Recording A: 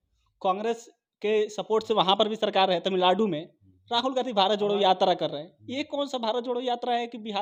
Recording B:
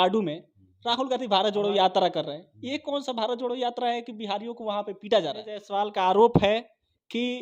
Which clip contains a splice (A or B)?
B